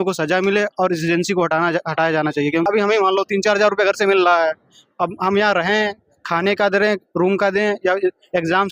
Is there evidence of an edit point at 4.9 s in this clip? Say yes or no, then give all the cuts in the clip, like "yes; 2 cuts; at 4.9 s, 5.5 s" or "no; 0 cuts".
no; 1 cut; at 2.6 s